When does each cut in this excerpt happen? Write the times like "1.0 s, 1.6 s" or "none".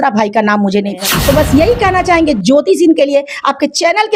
1.0 s